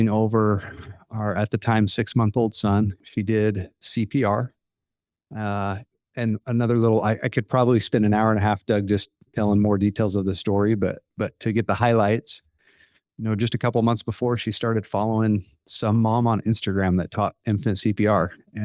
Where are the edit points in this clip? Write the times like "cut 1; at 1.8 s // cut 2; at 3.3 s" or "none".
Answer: cut 1; at 3.0 s